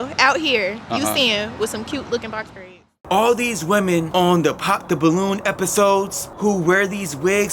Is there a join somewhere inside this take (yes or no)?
yes